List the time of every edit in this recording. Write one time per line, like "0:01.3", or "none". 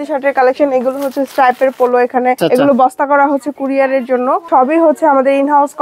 0:02.4
0:04.4

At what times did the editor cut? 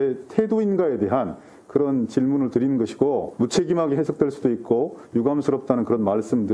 0:03.3

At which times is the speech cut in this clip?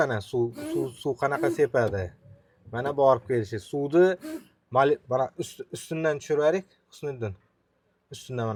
none

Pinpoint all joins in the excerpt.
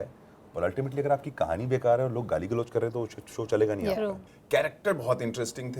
0:04.3

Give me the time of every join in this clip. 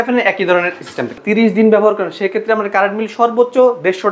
0:01.1

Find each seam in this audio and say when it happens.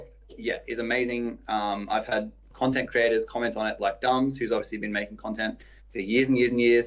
0:02.5

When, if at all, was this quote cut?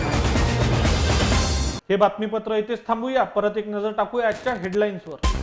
none

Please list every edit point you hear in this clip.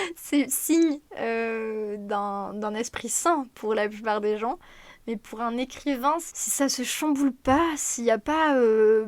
0:06.4

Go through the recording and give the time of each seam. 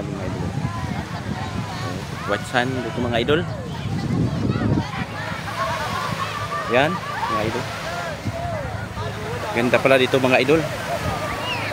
none

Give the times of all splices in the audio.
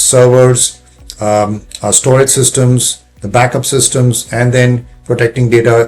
none

